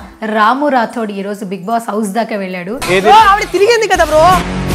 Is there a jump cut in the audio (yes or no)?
yes